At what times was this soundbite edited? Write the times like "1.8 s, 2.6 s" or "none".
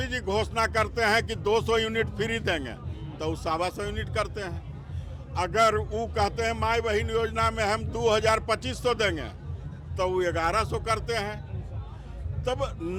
none